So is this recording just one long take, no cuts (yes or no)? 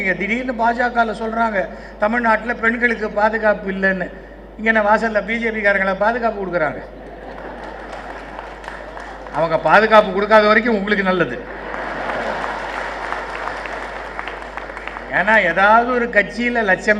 yes